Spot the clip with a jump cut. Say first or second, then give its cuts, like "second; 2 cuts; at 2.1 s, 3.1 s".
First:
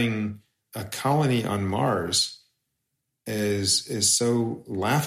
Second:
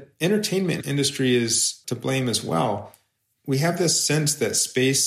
second; 2 cuts; at 0.8 s, 1.8 s